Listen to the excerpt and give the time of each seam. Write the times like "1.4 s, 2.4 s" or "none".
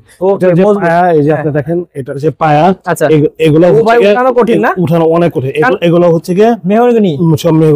none